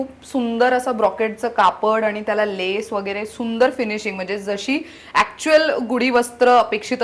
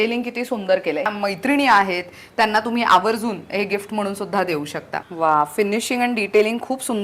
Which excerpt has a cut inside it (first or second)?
second